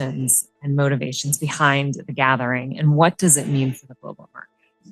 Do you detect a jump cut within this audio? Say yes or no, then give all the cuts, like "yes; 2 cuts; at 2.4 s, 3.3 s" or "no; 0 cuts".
no; 0 cuts